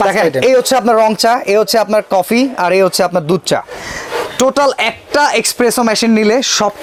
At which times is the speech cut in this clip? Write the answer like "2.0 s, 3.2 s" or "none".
none